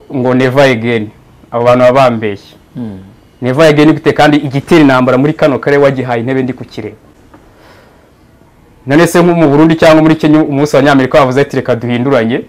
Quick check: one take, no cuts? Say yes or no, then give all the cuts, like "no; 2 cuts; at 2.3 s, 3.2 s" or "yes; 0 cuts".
yes; 0 cuts